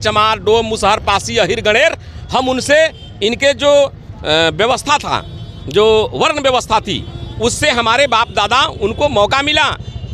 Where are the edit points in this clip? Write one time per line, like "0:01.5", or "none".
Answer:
none